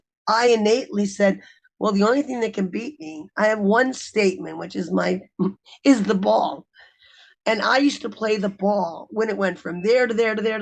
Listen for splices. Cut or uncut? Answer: uncut